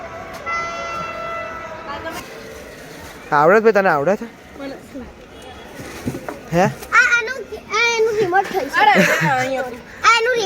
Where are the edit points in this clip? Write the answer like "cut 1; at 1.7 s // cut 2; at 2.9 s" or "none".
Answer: cut 1; at 2.2 s

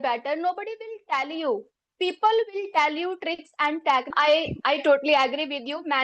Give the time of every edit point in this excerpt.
cut 1; at 4.1 s

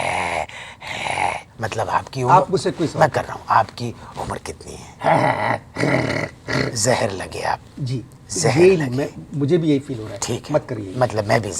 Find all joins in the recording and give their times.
cut 1; at 1.5 s

